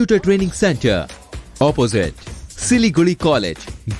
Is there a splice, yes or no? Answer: no